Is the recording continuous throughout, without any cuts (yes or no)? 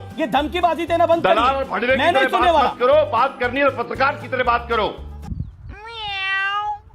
no